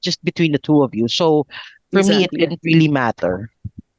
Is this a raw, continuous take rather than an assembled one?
yes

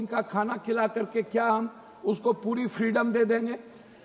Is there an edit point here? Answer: no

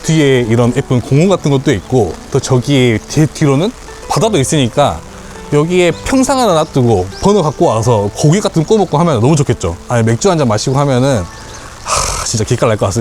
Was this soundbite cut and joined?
no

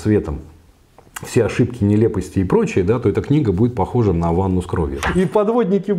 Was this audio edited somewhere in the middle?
yes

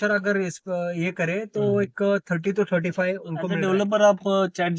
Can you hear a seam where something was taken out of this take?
yes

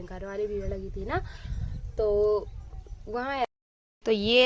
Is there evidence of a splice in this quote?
yes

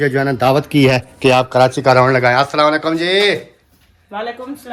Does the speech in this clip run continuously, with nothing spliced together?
yes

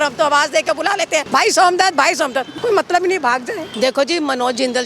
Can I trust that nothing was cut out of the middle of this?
no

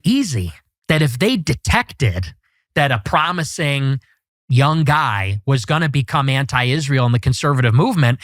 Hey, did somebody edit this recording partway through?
no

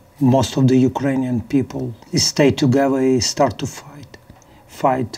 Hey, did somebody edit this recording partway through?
yes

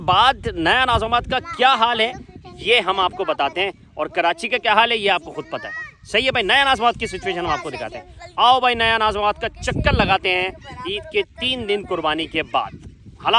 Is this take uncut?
yes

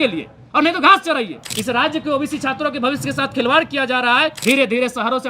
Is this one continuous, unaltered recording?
no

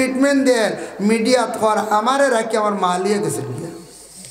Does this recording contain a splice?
no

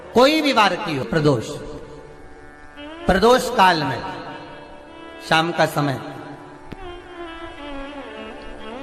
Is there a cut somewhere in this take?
yes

